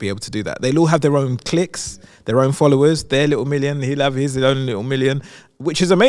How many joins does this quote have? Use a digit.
0